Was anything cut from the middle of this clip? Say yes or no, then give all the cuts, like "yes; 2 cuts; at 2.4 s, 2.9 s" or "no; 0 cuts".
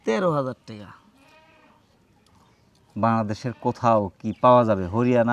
no; 0 cuts